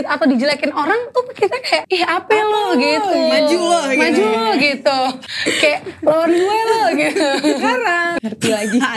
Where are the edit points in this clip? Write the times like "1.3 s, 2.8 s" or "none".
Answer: 1.8 s, 5.3 s, 8.2 s